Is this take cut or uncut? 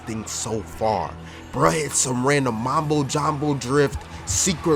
uncut